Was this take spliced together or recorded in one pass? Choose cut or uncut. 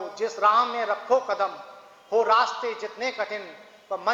uncut